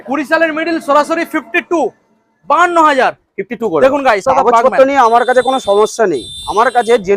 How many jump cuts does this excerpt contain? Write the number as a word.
one